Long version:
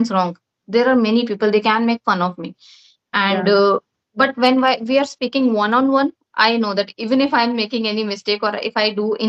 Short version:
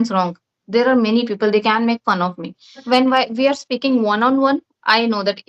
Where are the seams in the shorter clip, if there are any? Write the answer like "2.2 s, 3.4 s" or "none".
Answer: 2.8 s